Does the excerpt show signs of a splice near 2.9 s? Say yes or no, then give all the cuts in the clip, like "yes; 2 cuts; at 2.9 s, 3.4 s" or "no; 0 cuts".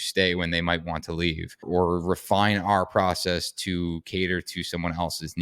no; 1 cut; at 1.6 s